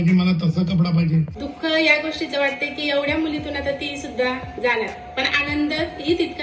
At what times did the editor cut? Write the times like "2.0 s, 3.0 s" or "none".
1.4 s